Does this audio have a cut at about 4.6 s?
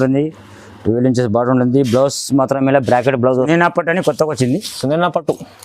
no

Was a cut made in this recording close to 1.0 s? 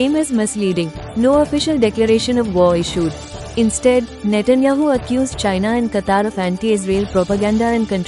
yes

